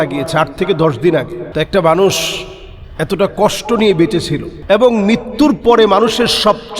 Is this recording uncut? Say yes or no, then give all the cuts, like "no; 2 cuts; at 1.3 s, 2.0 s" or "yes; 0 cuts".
no; 2 cuts; at 1.4 s, 4.5 s